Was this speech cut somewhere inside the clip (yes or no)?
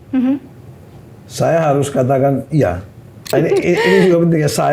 yes